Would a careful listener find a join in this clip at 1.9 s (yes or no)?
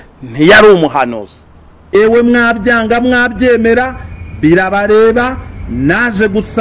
yes